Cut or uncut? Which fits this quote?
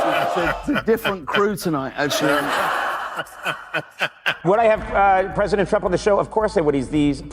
cut